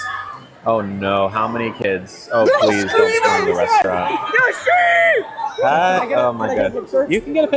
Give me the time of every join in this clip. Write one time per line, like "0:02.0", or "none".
none